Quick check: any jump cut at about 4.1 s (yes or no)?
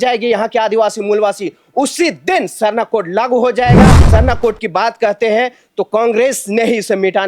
yes